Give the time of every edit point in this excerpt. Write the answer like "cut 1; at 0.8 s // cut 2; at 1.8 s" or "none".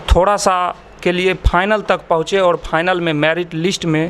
none